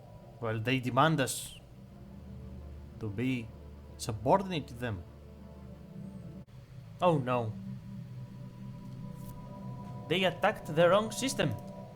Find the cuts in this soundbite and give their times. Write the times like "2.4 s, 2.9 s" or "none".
6.4 s